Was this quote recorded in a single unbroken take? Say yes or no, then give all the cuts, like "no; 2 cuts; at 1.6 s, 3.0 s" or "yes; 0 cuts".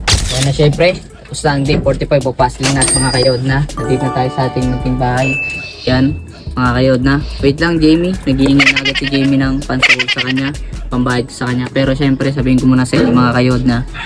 yes; 0 cuts